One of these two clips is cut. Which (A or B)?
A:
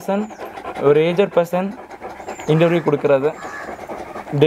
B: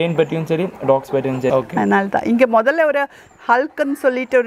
B